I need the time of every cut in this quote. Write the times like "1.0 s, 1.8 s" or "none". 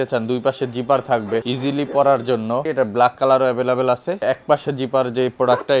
1.5 s, 2.6 s, 4.2 s